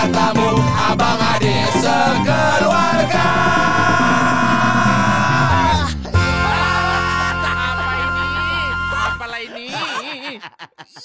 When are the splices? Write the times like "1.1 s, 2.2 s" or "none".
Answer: none